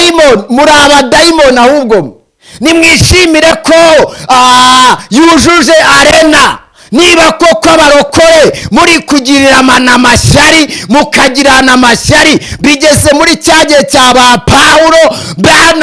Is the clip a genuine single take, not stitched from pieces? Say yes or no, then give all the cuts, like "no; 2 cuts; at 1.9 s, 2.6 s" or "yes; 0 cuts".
yes; 0 cuts